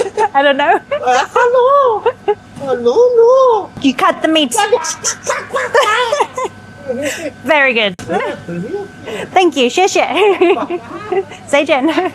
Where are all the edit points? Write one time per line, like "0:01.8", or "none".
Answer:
0:03.7